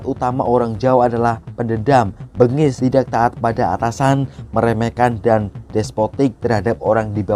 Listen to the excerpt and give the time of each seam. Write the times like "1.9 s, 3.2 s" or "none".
2.8 s